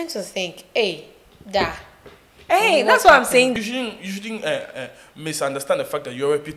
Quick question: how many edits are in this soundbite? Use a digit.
1